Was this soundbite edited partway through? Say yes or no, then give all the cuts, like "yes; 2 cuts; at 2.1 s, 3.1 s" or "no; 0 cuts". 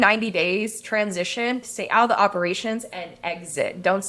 yes; 1 cut; at 1.6 s